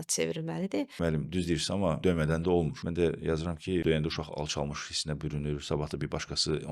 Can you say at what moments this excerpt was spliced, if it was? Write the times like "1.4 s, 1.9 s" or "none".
0.9 s, 2.0 s, 2.8 s, 3.8 s